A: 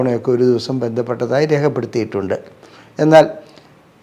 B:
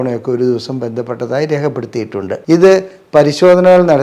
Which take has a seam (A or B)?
B